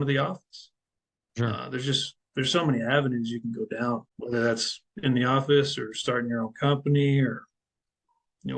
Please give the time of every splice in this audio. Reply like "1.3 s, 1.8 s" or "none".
4.1 s